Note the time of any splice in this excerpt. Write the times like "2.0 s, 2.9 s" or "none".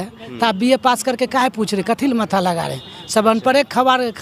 none

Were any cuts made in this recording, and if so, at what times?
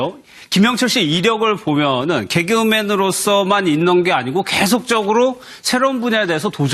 4.5 s

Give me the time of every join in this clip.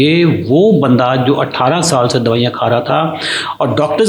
none

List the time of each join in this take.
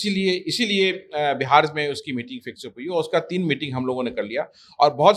none

